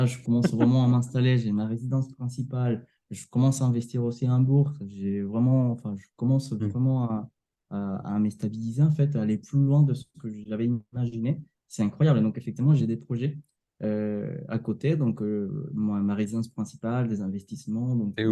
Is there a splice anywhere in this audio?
no; 0 cuts

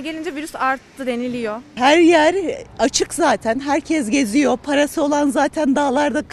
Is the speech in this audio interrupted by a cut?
yes; 1 cut; at 1.7 s

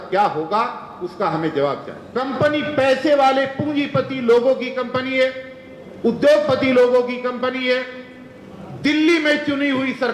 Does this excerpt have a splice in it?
yes; 1 cut; at 2.0 s

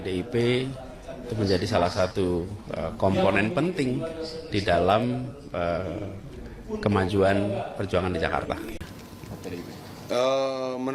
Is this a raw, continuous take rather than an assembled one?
no; 1 cut; at 9.0 s

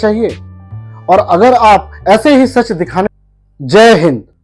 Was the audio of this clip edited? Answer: yes; 1 cut; at 3.1 s

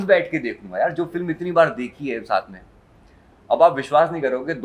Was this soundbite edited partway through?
no; 0 cuts

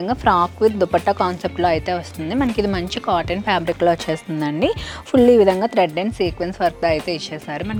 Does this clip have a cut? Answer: no; 0 cuts

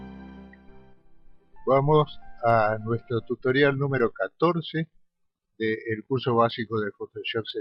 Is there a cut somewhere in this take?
no; 0 cuts

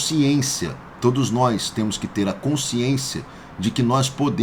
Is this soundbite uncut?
yes; 0 cuts

